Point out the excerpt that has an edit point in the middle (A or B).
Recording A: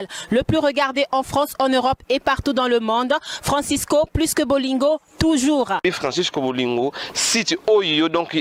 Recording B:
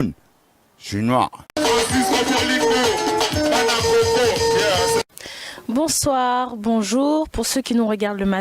B